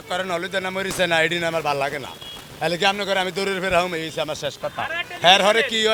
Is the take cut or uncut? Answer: uncut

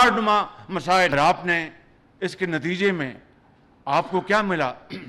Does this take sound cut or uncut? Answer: cut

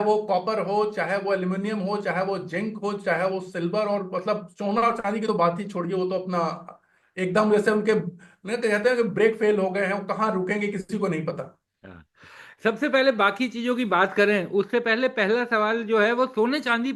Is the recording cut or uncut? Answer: uncut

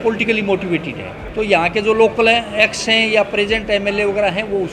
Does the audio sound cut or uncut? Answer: cut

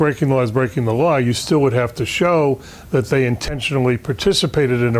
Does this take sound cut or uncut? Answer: uncut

